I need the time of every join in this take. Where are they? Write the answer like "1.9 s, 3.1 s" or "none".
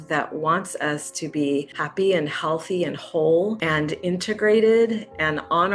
1.8 s, 3.6 s